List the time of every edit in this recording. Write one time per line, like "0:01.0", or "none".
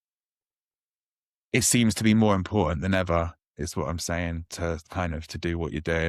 none